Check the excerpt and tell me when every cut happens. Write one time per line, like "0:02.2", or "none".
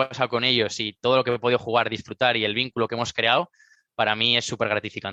none